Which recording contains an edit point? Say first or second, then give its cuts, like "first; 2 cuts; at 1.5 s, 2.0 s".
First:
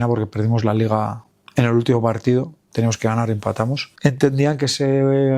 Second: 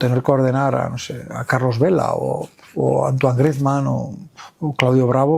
first; 1 cut; at 3.8 s